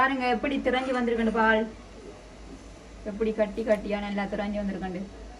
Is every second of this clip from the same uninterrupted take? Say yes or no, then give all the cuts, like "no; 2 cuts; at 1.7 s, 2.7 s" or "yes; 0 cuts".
yes; 0 cuts